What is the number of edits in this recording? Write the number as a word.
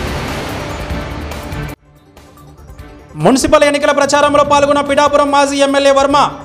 one